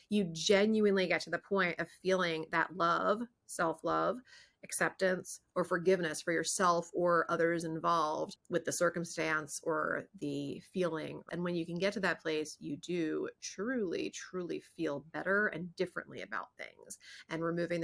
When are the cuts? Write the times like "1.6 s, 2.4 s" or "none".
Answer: 8.4 s, 11.2 s

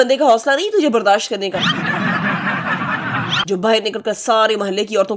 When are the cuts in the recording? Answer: none

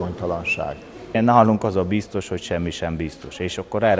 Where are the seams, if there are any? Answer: 1.2 s

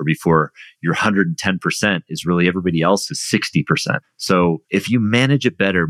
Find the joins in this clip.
4.1 s, 4.6 s

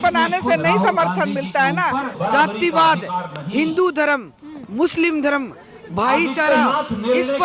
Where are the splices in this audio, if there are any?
2.1 s

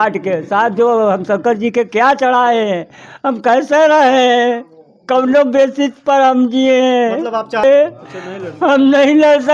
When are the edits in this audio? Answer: 7.6 s

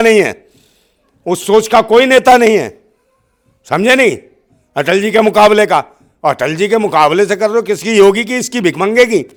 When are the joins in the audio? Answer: none

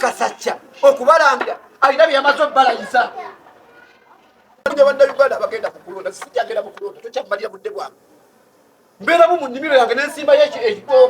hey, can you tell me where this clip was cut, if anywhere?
4.7 s

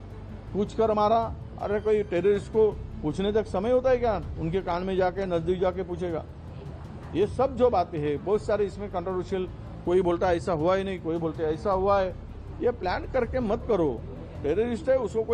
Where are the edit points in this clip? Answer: none

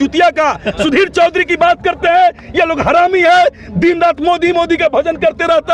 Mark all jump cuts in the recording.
none

